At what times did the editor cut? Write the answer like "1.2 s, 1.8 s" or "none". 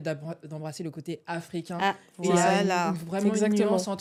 none